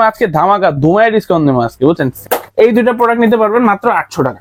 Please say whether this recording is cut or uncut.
cut